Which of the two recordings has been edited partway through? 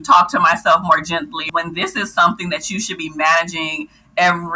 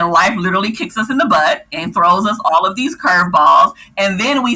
first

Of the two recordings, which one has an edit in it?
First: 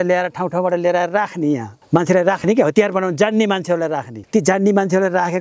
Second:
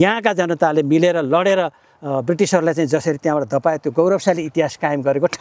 first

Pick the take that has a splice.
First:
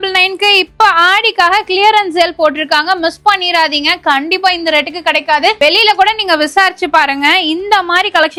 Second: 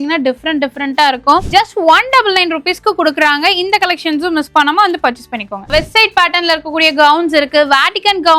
second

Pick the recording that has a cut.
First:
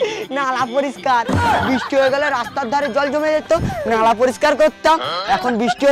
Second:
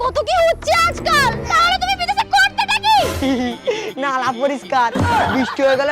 second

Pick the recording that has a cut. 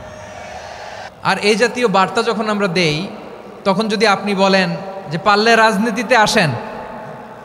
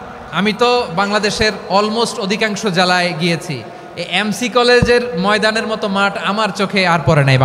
first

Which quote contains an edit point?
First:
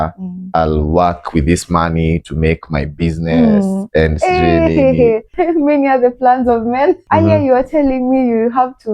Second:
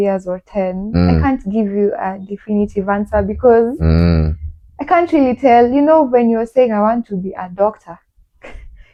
first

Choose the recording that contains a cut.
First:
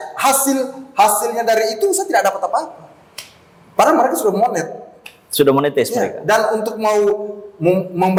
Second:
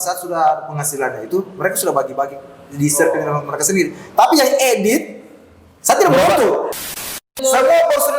second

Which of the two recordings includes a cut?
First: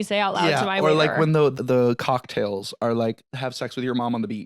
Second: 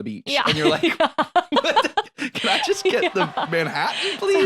first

